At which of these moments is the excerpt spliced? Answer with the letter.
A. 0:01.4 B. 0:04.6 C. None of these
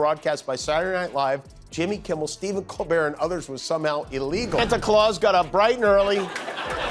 B